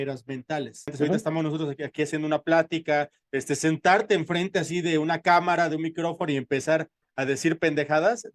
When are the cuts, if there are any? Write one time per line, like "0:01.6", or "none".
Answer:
0:00.9